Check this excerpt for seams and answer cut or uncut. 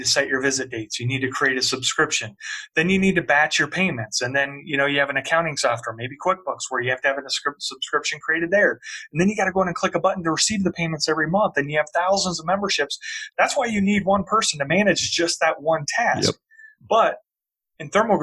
uncut